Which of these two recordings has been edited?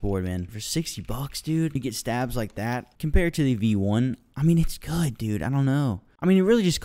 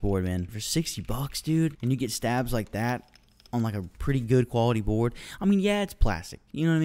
first; 2 cuts; at 1.7 s, 2.9 s

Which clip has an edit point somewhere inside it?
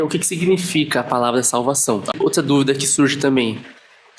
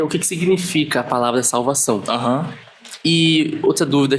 first; 1 cut; at 2.1 s

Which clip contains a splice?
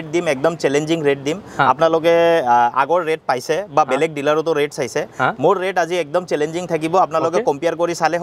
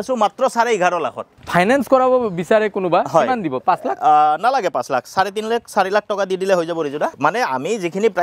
second; 2 cuts; at 1.4 s, 7.1 s

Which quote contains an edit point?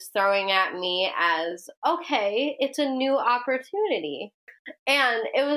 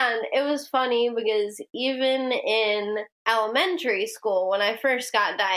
second; 1 cut; at 3.1 s

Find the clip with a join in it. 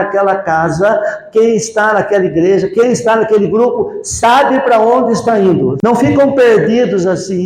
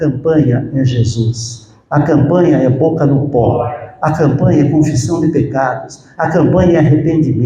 first; 1 cut; at 5.8 s

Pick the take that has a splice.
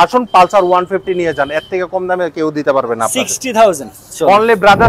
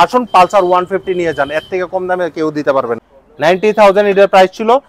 second; 1 cut; at 3.0 s

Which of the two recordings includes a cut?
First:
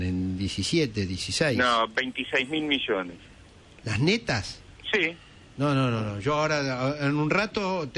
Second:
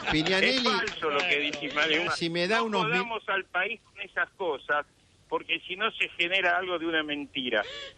first; 1 cut; at 1.0 s

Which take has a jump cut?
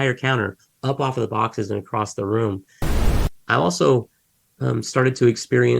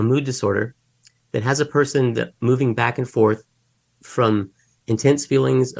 first; 1 cut; at 2.9 s

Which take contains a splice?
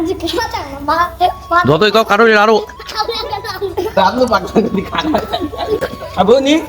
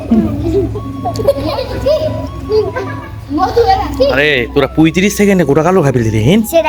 first; 1 cut; at 5.8 s

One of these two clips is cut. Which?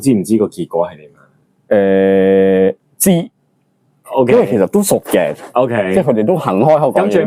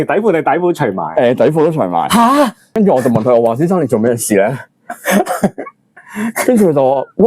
second; 1 cut; at 2.7 s

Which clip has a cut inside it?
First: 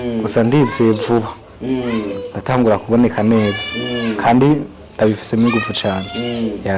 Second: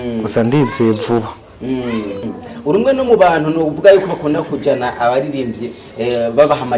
second; 1 cut; at 2.2 s

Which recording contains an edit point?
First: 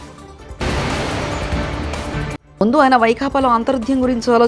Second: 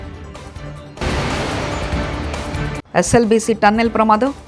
second; 2 cuts; at 1.0 s, 2.9 s

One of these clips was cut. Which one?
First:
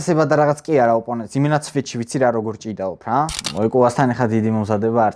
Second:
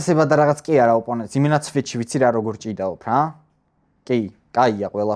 first; 1 cut; at 3.4 s

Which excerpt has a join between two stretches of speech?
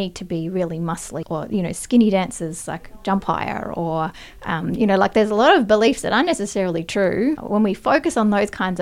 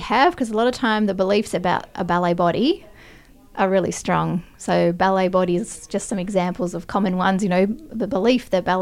first; 2 cuts; at 1.2 s, 7.4 s

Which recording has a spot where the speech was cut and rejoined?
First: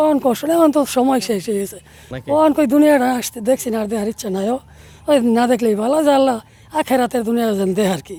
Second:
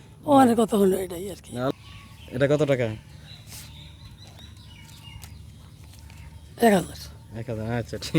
second; 1 cut; at 1.7 s

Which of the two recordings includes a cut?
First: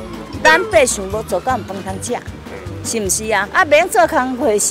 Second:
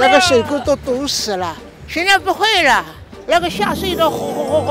first; 1 cut; at 3.5 s

